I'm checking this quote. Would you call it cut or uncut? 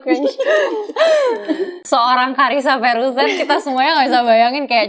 cut